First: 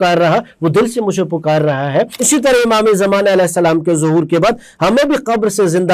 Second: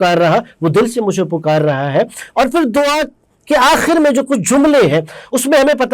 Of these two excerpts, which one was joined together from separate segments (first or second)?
first